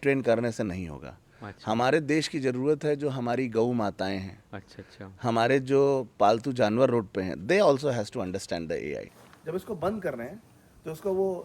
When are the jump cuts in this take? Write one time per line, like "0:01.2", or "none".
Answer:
0:09.2